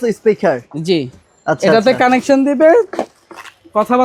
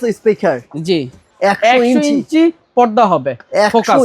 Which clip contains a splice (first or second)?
second